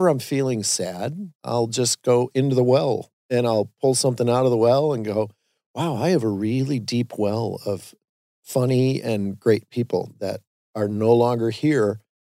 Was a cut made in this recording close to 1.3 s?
yes; 1 cut; at 1.3 s

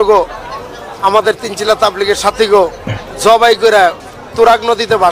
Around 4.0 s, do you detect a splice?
yes; 2 cuts; at 3.1 s, 4.0 s

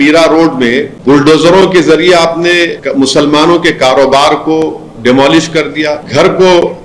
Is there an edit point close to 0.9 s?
yes; 3 cuts; at 0.9 s, 2.8 s, 6.0 s

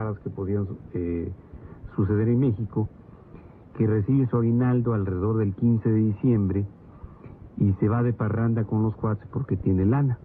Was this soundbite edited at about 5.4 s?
yes; 1 cut; at 5.4 s

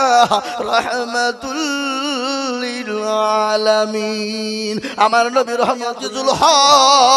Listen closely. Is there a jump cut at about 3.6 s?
no; 1 cut; at 6.1 s

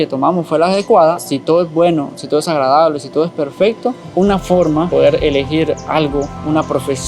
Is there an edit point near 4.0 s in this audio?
yes; 3 cuts; at 1.2 s, 4.0 s, 4.9 s

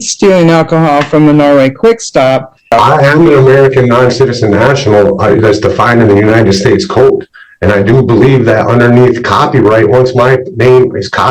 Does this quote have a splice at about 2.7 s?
yes; 1 cut; at 2.7 s

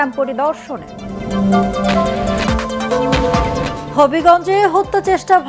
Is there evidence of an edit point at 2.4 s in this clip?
yes; 1 cut; at 2.4 s

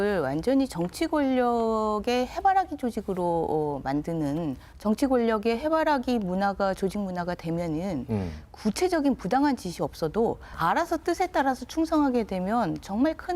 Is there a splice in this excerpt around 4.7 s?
yes; 2 cuts; at 4.7 s, 10.5 s

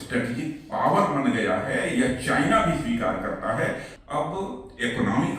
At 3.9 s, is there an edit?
yes; 1 cut; at 3.9 s

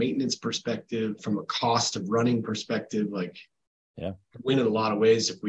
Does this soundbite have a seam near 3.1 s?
no; 0 cuts

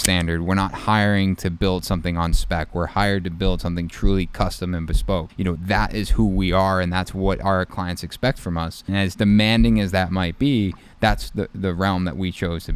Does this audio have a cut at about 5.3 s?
yes; 2 cuts; at 5.3 s, 8.9 s

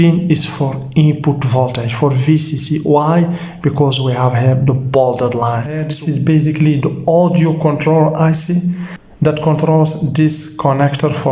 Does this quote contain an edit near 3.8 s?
no; 1 cut; at 5.9 s

